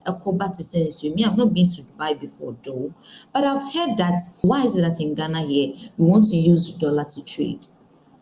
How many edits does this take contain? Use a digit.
1